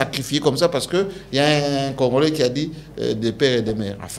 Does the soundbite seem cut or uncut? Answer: uncut